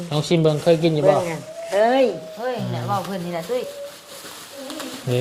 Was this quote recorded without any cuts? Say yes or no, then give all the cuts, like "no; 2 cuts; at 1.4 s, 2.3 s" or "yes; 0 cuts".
yes; 0 cuts